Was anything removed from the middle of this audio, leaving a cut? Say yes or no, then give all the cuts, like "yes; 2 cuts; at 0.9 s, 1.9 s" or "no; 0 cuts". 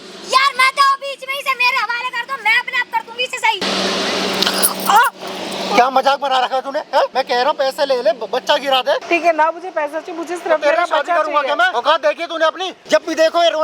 yes; 5 cuts; at 3.6 s, 7.1 s, 9.0 s, 11.7 s, 12.7 s